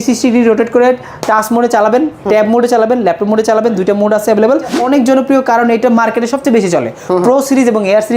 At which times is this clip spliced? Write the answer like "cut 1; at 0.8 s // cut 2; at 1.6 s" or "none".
cut 1; at 4.8 s